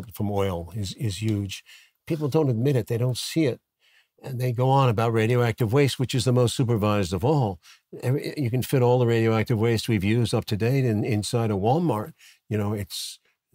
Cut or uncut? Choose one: uncut